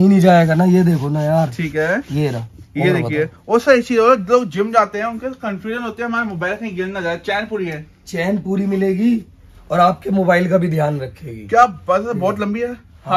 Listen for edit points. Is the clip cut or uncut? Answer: uncut